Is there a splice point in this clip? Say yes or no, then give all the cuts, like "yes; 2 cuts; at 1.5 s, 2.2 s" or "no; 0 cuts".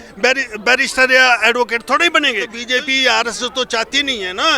yes; 1 cut; at 2.6 s